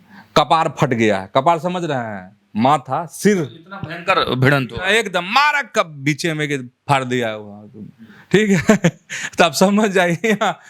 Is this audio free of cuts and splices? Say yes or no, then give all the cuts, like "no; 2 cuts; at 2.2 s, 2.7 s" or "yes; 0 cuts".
yes; 0 cuts